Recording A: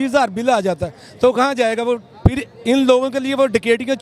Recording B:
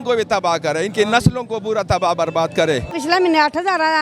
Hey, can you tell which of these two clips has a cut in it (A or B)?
B